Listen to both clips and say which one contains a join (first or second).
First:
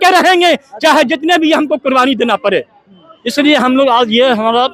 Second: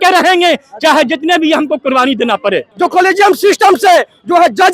second